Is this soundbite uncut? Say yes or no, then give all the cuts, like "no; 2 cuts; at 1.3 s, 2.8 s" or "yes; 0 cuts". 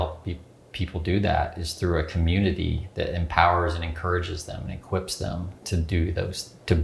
yes; 0 cuts